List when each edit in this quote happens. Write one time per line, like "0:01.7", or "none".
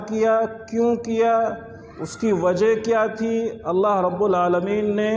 none

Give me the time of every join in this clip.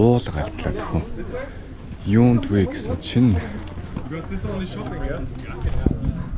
none

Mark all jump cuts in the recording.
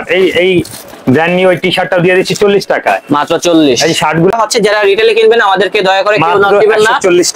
0:04.3

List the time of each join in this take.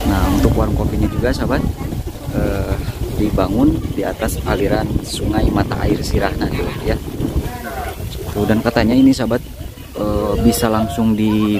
0:07.5

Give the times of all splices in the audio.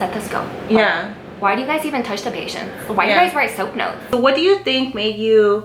0:04.0

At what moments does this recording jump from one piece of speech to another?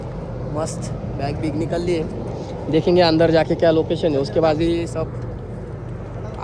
none

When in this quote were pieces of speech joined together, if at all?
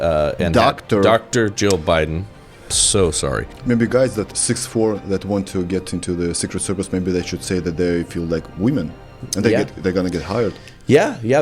0:03.5
0:04.3

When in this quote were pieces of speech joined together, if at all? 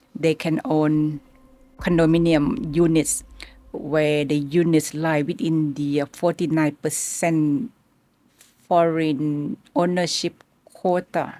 none

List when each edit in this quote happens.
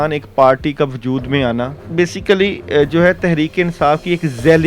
0:01.8

